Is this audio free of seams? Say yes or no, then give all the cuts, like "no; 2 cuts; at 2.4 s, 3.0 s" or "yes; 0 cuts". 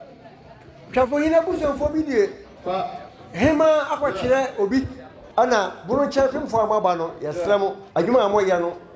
no; 2 cuts; at 5.2 s, 7.8 s